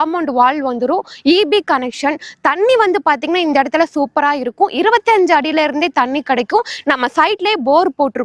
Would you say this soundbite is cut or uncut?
uncut